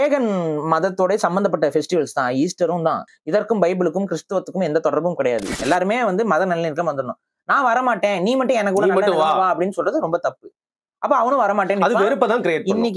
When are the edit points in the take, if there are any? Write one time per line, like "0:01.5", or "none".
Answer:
0:03.1
0:05.5